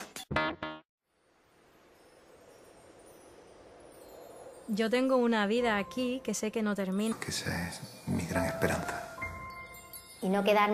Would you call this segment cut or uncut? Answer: uncut